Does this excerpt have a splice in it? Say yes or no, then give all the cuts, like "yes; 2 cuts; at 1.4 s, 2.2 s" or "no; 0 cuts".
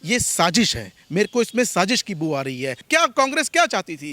yes; 1 cut; at 2.8 s